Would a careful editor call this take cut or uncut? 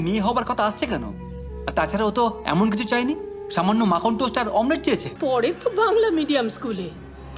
cut